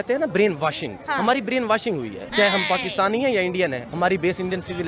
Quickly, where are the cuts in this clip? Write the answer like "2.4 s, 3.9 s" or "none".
0.9 s, 2.2 s, 3.9 s